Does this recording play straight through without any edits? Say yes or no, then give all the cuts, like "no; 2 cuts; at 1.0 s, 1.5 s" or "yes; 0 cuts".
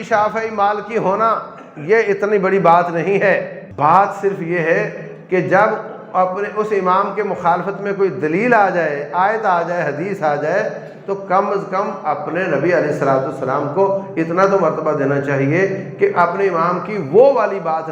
no; 1 cut; at 3.6 s